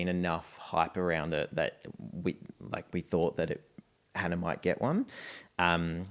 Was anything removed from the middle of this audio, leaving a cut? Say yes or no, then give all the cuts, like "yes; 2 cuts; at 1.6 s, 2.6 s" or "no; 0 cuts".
no; 0 cuts